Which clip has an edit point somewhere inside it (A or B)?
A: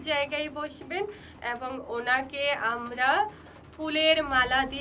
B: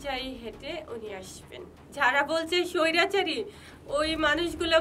B